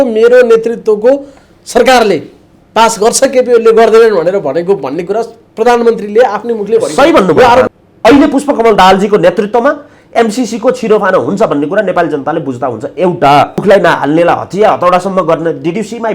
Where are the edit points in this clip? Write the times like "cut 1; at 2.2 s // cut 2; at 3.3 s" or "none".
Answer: cut 1; at 7.7 s // cut 2; at 13.6 s